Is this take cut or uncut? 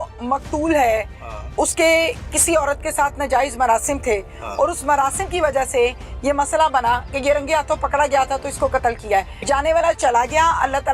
cut